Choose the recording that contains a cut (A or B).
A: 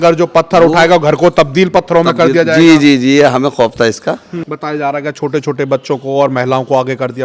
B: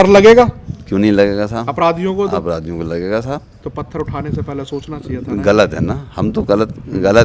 A